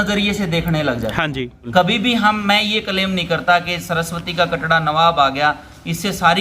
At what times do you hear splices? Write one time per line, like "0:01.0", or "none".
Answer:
0:01.7